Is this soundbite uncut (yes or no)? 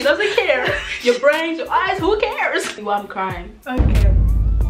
no